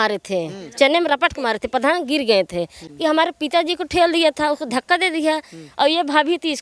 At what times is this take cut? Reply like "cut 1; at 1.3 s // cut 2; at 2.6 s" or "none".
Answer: cut 1; at 2.8 s

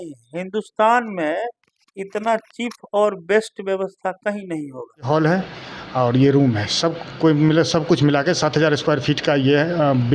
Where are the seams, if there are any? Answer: cut 1; at 5.1 s

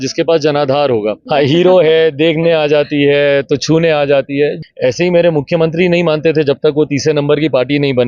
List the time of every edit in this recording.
cut 1; at 1.2 s // cut 2; at 4.6 s

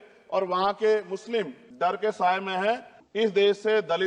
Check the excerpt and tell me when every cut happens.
cut 1; at 1.6 s // cut 2; at 3.0 s

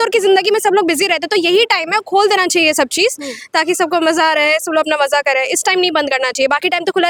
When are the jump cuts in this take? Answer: none

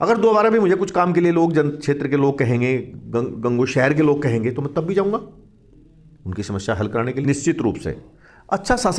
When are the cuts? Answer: cut 1; at 7.2 s

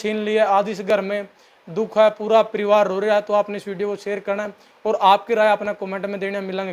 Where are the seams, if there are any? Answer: none

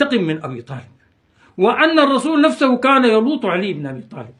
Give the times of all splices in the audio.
cut 1; at 1.2 s

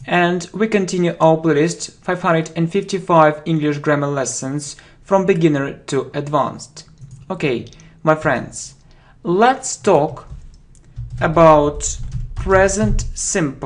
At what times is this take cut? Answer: cut 1; at 11.6 s

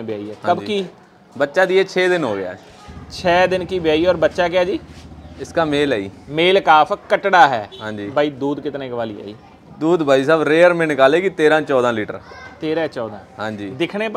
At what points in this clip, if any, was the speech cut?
none

